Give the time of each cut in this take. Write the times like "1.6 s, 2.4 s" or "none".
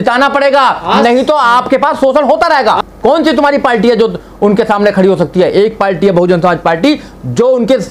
2.8 s